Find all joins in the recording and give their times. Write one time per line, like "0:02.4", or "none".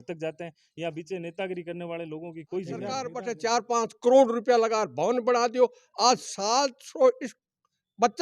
0:03.2